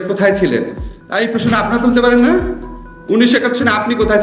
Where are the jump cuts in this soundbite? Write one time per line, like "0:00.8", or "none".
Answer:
none